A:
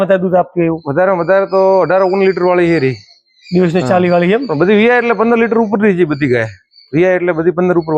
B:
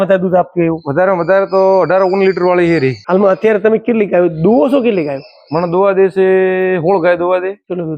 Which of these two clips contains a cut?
B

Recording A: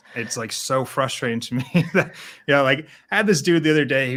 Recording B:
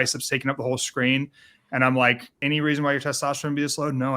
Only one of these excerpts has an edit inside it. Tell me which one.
B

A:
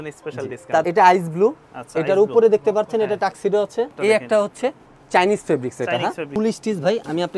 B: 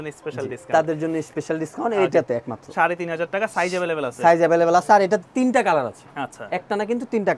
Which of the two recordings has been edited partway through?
A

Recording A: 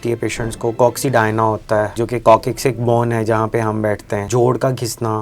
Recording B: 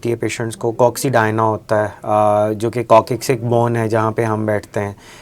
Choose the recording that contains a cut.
A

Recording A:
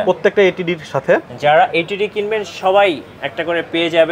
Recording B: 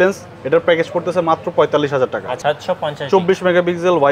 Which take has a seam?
B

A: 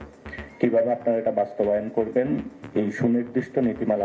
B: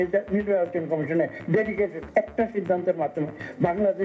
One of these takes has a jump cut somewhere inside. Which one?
B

